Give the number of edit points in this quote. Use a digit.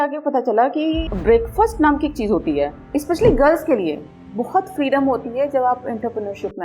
2